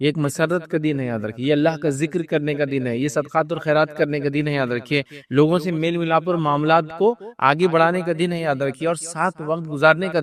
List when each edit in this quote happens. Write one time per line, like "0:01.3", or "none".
none